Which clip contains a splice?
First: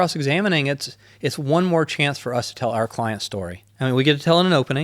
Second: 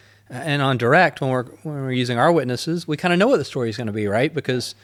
first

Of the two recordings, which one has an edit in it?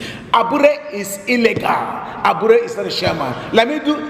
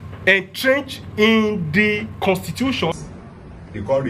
second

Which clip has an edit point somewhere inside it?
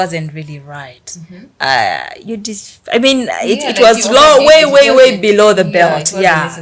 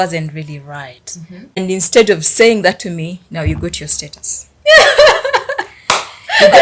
second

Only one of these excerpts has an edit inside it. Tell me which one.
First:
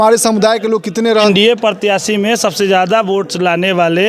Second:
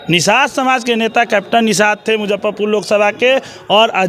first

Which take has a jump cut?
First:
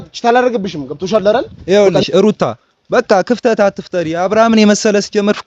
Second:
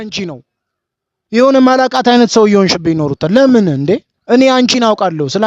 first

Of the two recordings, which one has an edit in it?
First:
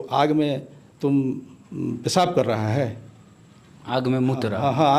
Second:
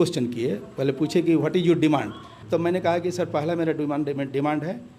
second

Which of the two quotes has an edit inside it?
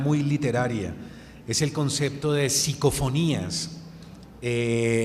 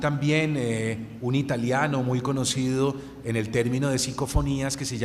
first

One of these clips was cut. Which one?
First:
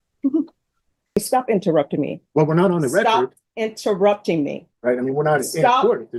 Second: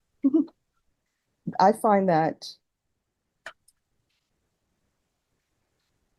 first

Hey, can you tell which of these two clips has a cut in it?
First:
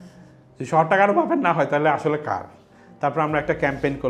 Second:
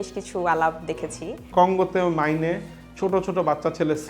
second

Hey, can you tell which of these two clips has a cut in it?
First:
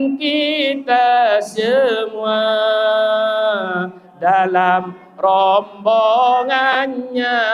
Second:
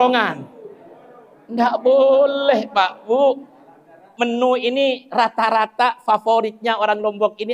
second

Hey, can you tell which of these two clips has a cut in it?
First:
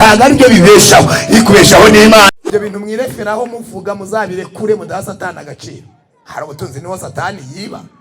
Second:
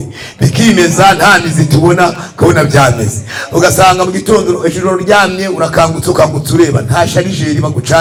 first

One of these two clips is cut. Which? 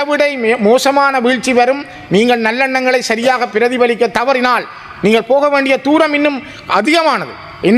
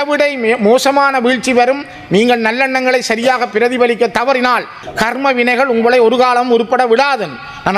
second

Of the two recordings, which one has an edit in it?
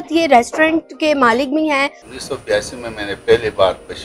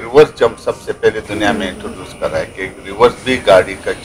first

